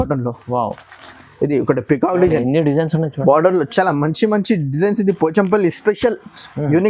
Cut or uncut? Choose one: uncut